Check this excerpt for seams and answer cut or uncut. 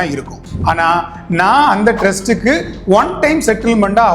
uncut